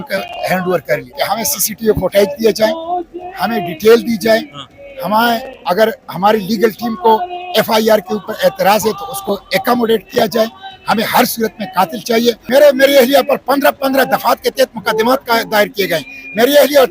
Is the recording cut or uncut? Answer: cut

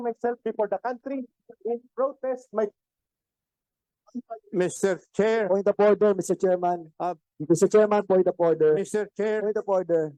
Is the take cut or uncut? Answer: uncut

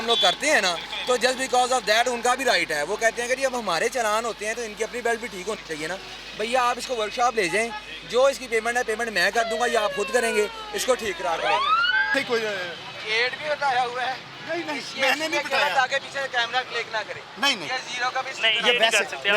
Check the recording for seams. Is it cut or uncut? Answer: cut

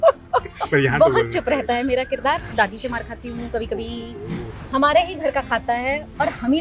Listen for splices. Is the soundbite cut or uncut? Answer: cut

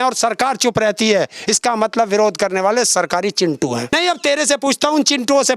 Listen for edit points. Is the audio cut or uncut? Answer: cut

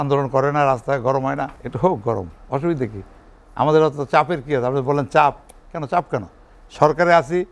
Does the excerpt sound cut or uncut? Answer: cut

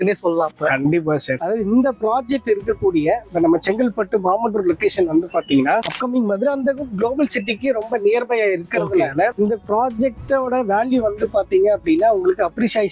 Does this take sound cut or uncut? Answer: uncut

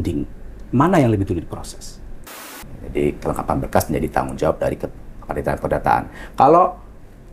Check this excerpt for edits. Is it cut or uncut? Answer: cut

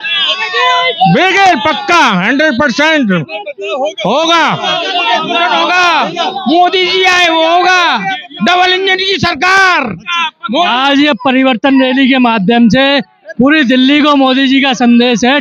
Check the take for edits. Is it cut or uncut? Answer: uncut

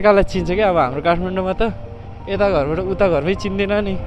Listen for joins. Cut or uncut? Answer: uncut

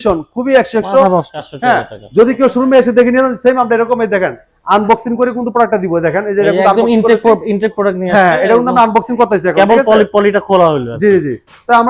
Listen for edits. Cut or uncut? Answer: cut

